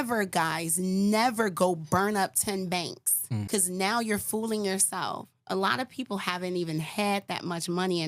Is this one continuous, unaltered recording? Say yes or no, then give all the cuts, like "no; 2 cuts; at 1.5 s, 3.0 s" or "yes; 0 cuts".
no; 1 cut; at 3.4 s